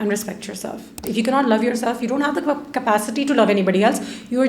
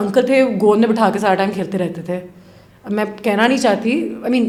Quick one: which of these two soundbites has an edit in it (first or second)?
first